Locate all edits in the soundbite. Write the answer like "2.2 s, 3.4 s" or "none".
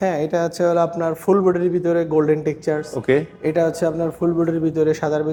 none